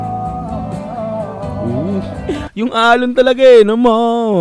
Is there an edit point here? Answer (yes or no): no